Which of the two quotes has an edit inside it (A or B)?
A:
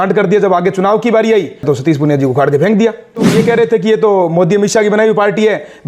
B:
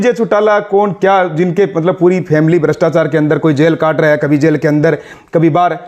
A